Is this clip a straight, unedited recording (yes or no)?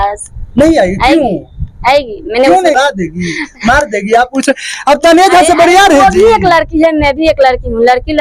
no